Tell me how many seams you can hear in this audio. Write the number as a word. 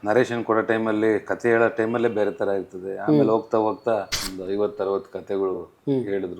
one